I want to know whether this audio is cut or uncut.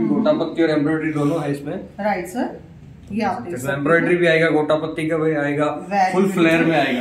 uncut